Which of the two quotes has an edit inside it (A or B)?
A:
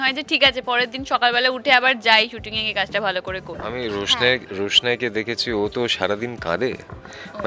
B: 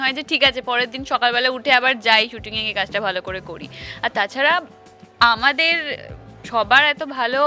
A